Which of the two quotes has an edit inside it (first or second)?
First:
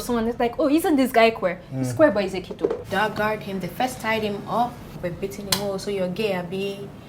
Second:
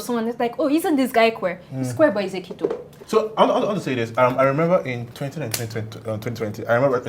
first